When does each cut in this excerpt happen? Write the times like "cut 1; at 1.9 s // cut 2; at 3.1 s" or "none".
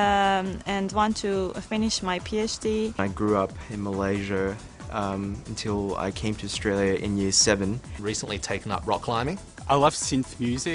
none